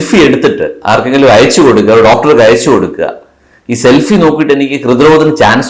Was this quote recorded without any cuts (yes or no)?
yes